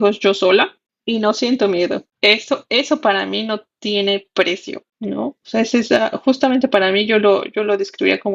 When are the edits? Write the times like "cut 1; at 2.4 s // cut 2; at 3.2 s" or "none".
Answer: none